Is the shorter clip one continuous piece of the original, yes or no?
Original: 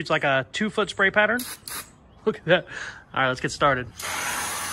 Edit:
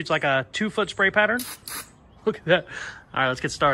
yes